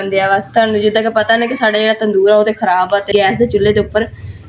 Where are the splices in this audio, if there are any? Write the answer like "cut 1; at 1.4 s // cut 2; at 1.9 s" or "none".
cut 1; at 3.1 s